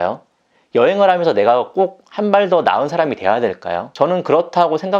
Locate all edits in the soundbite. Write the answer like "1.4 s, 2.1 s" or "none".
3.8 s